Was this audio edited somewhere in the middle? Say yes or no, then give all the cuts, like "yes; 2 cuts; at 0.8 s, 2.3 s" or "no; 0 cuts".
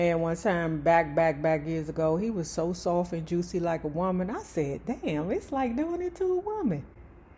no; 0 cuts